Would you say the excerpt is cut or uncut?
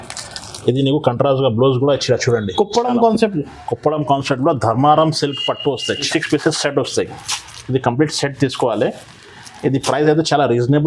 cut